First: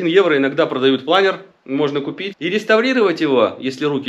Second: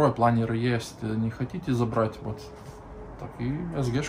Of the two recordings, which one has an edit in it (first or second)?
first